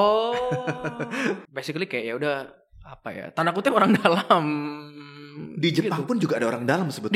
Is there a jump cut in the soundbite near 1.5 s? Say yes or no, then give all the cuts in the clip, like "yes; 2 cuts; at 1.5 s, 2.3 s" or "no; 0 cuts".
yes; 1 cut; at 1.5 s